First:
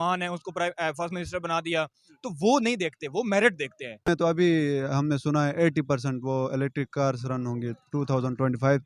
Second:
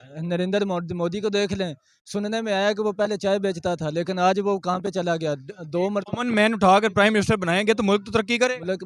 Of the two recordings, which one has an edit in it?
first; 1 cut; at 4.1 s

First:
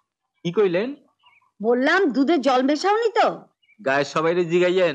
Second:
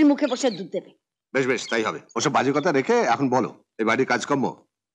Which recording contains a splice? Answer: second; 1 cut; at 2.0 s

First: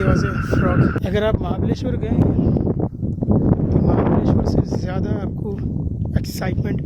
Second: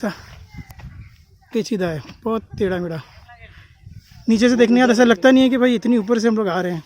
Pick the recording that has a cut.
first; 1 cut; at 1.0 s

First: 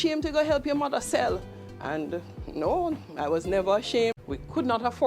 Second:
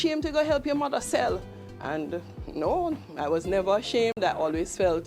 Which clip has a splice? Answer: first; 1 cut; at 4.2 s

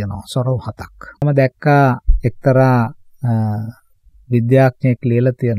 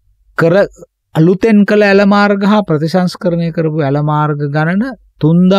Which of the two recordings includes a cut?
first; 1 cut; at 1.2 s

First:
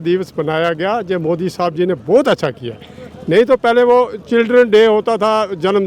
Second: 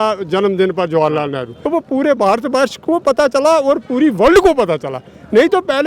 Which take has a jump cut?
second; 1 cut; at 1.5 s

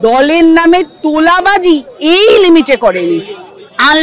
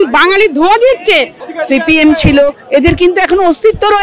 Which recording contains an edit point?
second; 1 cut; at 1.5 s

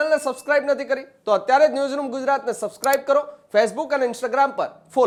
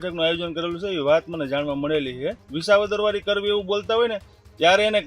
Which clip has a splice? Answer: second; 1 cut; at 2.5 s

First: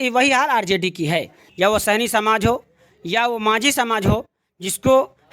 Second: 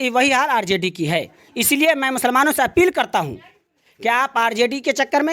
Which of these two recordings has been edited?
first; 1 cut; at 1.4 s

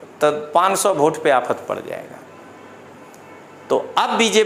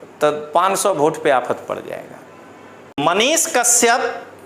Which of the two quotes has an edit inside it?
second; 1 cut; at 3.0 s

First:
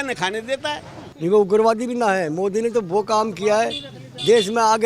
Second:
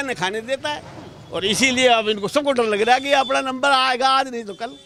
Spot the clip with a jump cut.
first; 1 cut; at 1.1 s

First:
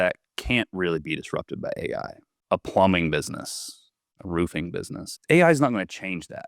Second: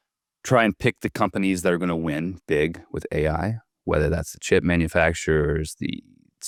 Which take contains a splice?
first; 2 cuts; at 2.3 s, 5.0 s

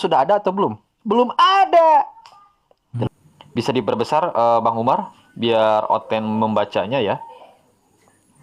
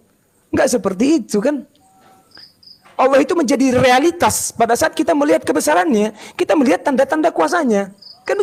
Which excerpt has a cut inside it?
first; 1 cut; at 3.1 s

